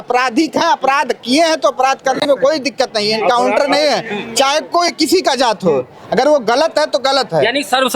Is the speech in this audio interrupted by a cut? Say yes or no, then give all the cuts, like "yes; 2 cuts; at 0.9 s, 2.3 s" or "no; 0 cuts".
no; 0 cuts